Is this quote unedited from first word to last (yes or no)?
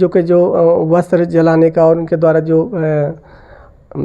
yes